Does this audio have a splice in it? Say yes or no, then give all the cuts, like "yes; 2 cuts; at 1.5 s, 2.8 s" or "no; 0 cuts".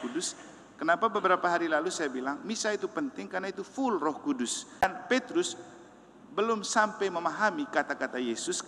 yes; 1 cut; at 4.8 s